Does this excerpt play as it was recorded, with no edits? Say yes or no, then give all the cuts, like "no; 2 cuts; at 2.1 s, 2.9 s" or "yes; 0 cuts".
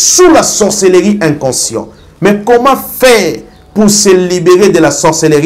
yes; 0 cuts